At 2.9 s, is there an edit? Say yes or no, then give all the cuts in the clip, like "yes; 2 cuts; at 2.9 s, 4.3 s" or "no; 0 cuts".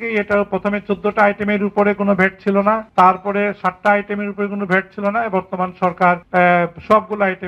yes; 2 cuts; at 2.9 s, 6.2 s